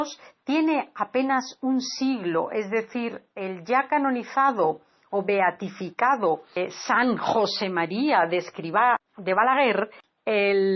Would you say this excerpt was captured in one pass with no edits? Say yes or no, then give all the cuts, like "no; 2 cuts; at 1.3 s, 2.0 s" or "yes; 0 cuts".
yes; 0 cuts